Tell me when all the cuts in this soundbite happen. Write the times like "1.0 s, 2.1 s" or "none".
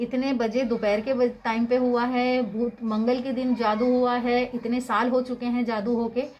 none